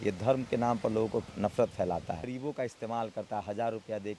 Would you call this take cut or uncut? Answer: cut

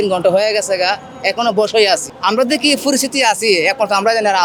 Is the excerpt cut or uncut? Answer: uncut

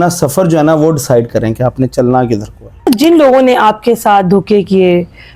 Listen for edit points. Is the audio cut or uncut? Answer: cut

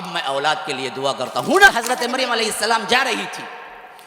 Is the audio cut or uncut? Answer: cut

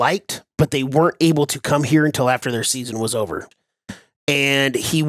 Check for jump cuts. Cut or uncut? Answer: cut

